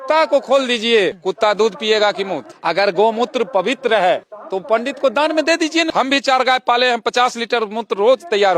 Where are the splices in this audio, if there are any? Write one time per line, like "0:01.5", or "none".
0:02.4
0:04.6
0:05.9